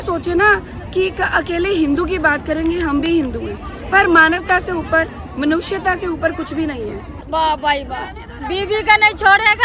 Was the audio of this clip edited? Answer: yes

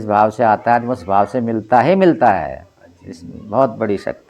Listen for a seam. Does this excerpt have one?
no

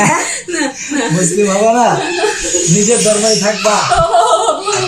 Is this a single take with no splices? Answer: yes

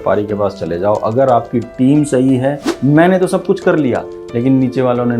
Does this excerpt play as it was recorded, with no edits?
no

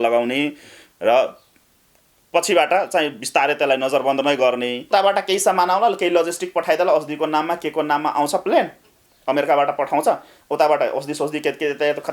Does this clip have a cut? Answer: yes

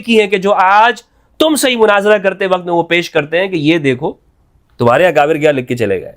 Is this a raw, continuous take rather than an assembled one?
yes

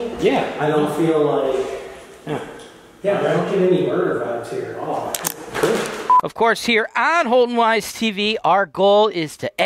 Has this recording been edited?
yes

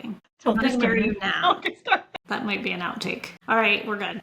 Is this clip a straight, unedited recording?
no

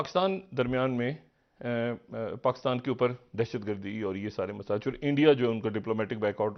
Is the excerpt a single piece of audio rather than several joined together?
yes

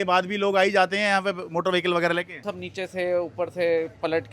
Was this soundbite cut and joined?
yes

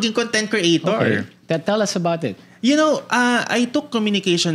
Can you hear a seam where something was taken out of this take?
no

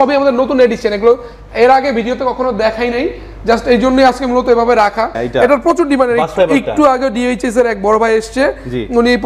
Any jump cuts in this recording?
yes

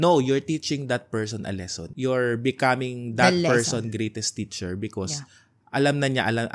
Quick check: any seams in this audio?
yes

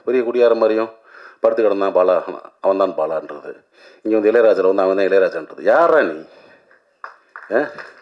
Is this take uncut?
yes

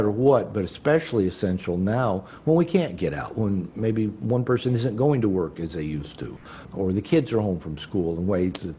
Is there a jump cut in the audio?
yes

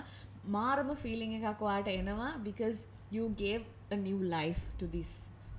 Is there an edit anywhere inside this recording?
no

